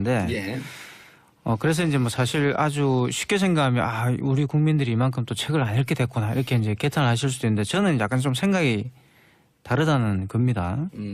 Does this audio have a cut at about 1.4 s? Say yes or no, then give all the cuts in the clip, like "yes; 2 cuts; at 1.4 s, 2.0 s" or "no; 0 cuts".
yes; 1 cut; at 1.4 s